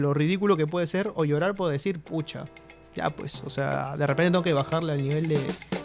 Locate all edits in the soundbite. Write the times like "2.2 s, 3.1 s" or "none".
none

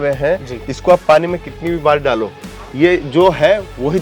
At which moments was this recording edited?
none

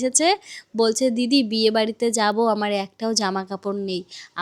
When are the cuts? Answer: none

